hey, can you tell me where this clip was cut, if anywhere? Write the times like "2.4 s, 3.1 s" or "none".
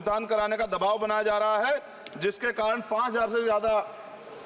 none